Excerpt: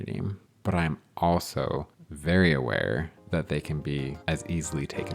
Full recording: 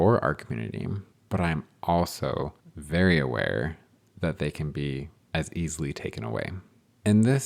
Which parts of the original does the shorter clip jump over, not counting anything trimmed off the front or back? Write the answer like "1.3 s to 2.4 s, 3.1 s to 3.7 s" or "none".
3.8 s to 4.1 s, 5.1 s to 5.2 s